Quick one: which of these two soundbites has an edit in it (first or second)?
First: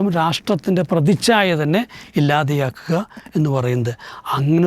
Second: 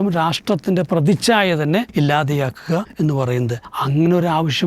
second